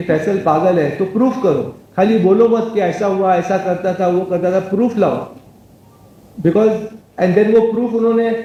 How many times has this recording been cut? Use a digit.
0